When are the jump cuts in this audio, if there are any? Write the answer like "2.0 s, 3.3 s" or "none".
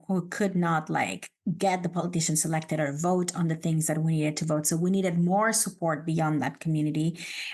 none